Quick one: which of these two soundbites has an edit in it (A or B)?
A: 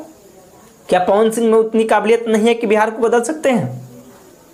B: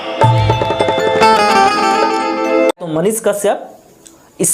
B